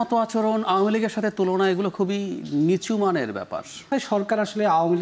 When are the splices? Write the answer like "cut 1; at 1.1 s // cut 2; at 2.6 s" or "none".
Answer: cut 1; at 3.8 s